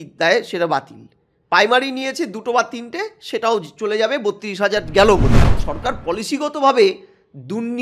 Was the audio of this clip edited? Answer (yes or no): yes